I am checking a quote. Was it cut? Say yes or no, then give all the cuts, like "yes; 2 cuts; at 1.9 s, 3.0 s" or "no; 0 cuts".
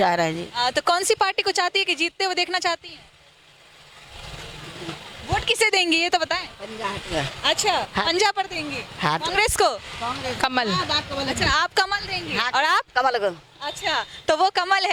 no; 0 cuts